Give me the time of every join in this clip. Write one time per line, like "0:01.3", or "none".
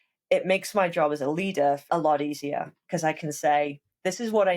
0:01.8